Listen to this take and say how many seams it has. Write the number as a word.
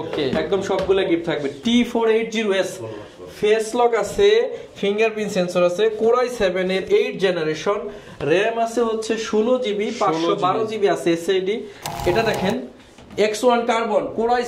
one